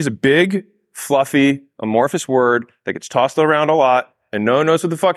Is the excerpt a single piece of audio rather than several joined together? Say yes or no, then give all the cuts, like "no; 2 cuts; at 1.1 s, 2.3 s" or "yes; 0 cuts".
yes; 0 cuts